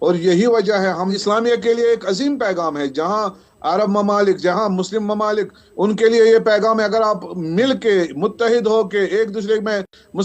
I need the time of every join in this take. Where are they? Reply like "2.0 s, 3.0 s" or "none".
1.1 s